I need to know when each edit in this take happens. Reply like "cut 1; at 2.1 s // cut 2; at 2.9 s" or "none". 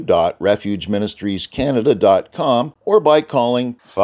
cut 1; at 2.7 s